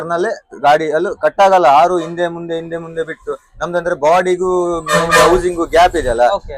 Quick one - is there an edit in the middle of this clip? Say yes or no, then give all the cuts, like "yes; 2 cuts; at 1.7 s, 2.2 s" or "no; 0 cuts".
no; 0 cuts